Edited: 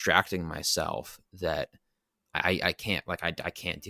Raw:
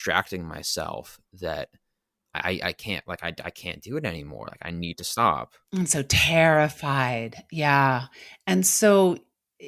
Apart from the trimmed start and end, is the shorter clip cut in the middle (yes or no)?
no